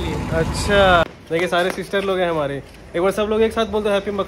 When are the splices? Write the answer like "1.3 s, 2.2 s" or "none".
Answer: 1.1 s